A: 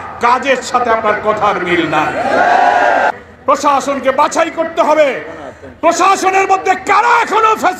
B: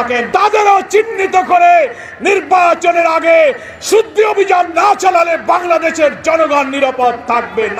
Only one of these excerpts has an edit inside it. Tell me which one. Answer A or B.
A